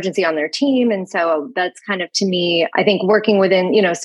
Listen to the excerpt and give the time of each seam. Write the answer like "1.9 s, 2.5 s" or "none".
none